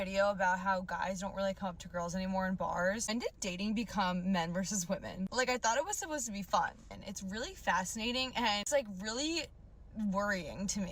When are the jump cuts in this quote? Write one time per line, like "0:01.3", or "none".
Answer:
0:03.0
0:06.9

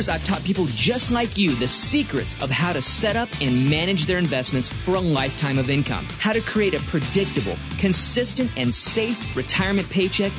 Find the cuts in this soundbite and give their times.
none

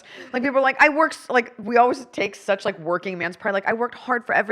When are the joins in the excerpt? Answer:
0:01.6

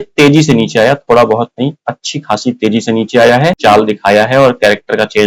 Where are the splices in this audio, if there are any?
0:03.6

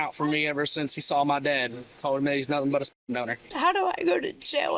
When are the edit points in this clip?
0:03.4

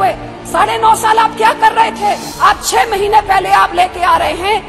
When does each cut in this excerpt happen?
0:02.3

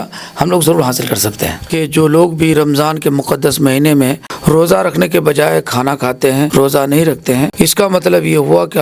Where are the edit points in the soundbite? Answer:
0:01.8
0:04.3
0:06.5
0:07.5

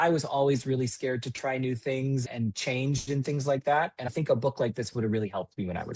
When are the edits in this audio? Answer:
0:02.2
0:04.0

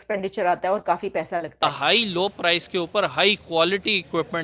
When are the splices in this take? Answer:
0:01.7

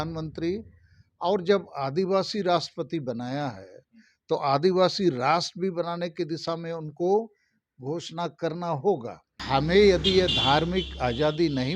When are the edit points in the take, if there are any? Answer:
0:09.4

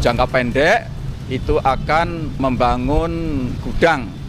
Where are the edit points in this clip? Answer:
0:02.4

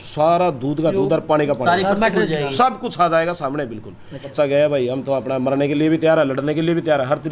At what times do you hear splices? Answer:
0:04.3

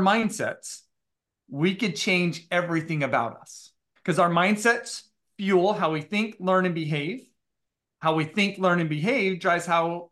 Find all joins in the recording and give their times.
0:03.9

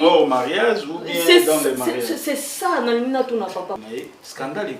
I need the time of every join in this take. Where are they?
0:03.8

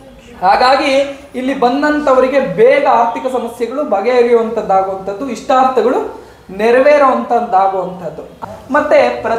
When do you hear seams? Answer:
0:08.3

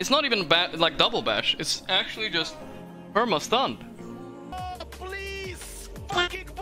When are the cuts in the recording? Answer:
0:04.5

